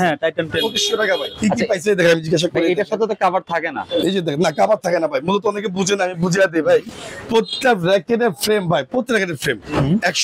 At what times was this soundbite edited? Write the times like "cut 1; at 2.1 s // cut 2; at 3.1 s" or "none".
none